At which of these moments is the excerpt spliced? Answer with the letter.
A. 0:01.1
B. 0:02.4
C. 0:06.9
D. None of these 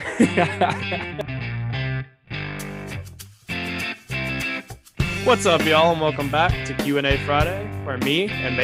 A